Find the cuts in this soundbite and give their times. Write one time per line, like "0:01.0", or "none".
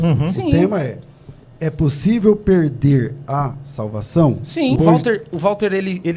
0:04.8